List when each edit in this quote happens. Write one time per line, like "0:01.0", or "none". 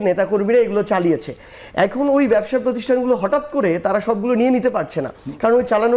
none